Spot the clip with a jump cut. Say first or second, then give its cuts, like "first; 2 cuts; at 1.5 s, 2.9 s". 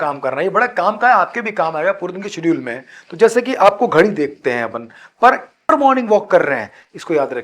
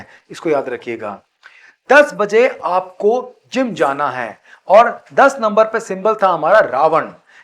first; 1 cut; at 5.7 s